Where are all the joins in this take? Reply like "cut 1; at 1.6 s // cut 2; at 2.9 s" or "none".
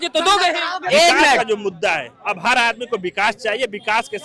cut 1; at 1.4 s